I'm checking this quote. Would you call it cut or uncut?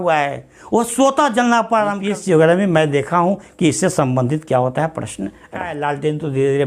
cut